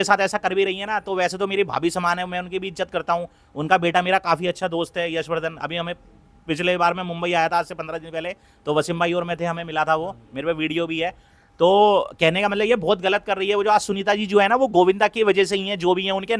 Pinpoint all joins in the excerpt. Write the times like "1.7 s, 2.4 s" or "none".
none